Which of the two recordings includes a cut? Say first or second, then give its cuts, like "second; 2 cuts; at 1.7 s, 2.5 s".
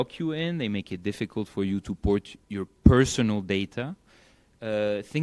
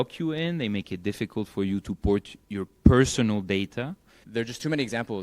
second; 1 cut; at 4.2 s